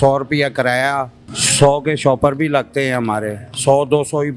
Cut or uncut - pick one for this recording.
uncut